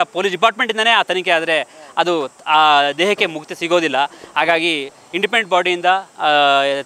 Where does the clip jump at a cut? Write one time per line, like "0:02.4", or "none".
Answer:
none